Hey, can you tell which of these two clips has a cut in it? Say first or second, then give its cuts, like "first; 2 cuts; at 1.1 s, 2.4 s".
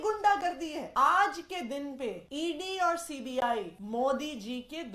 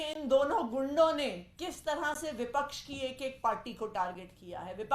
first; 3 cuts; at 0.8 s, 2.2 s, 3.8 s